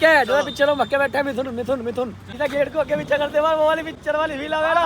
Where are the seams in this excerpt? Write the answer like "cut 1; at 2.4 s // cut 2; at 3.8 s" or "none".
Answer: cut 1; at 2.2 s // cut 2; at 3.9 s